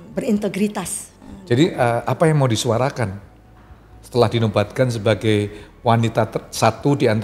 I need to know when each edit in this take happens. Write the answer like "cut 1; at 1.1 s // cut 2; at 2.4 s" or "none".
cut 1; at 1.1 s